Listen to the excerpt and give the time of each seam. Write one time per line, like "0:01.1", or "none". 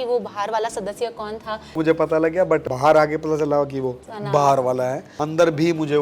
0:01.8
0:02.7
0:04.1
0:05.1